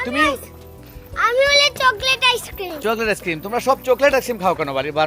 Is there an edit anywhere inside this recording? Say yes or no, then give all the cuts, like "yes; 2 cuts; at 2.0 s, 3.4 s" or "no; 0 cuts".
no; 0 cuts